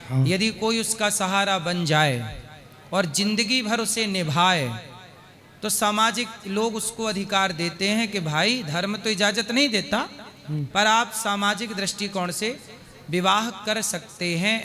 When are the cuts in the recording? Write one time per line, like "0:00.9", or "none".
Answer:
none